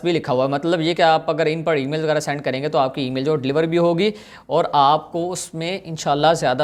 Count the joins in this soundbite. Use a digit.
0